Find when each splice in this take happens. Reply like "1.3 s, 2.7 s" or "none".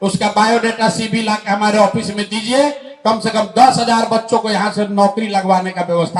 none